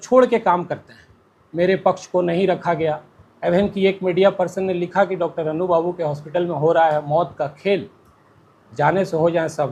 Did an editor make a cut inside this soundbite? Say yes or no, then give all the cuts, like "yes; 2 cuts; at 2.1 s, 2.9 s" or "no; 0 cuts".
no; 0 cuts